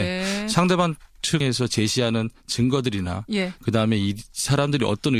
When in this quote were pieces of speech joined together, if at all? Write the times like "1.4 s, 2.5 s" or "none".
2.9 s